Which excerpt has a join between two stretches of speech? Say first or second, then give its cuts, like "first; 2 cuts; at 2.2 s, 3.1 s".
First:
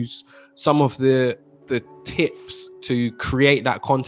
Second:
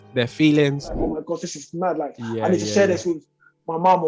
second; 1 cut; at 1.1 s